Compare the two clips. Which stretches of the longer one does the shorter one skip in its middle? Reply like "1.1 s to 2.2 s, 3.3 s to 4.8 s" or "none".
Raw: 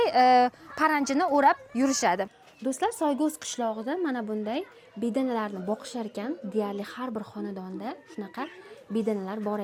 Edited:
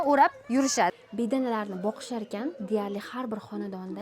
2.2 s to 4.8 s

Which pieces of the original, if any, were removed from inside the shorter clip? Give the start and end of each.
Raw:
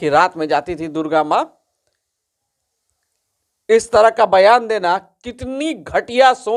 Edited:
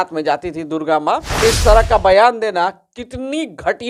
1.5 s to 3.6 s

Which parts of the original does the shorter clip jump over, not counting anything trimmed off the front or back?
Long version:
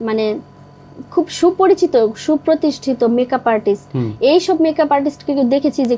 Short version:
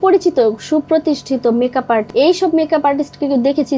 3.6 s to 4.1 s

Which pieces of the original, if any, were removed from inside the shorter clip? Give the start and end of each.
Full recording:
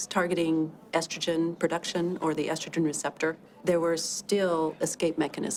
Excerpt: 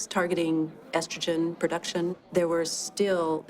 2.2 s to 3.5 s

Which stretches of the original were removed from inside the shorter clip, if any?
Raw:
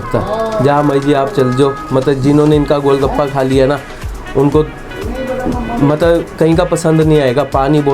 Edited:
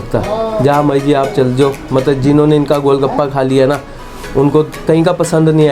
4.8 s to 6.3 s

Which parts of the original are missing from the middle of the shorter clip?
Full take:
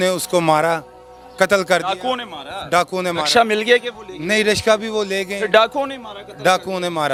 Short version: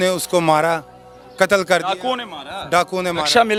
none

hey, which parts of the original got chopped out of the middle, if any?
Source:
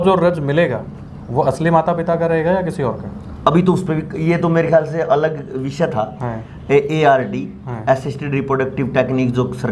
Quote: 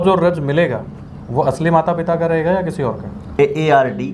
3.2 s to 6.6 s

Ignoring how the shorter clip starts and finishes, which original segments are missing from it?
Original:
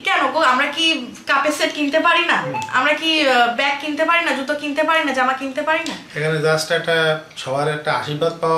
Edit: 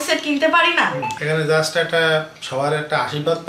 2.6 s to 6.1 s

